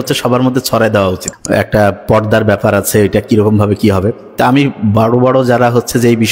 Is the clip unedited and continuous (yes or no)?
no